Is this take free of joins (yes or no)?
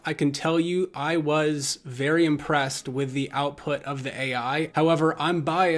no